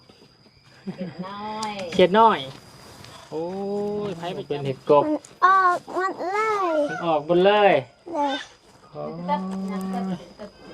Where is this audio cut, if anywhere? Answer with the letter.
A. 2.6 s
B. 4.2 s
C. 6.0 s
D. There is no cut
B